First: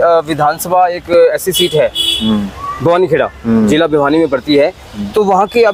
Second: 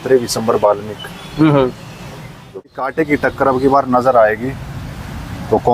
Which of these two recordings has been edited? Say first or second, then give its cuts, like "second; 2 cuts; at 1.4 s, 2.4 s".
second; 1 cut; at 2.7 s